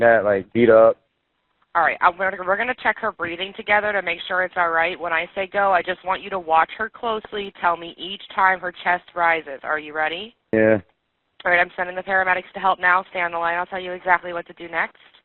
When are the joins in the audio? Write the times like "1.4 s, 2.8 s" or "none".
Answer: none